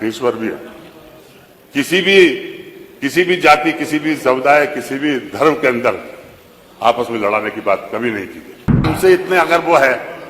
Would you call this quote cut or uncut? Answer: cut